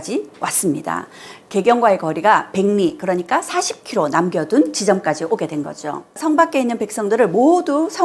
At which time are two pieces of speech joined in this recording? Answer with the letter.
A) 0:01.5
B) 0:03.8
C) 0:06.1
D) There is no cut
C